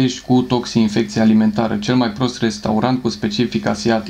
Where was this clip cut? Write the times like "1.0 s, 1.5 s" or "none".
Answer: none